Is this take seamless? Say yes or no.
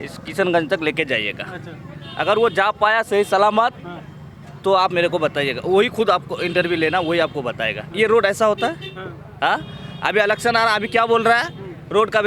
yes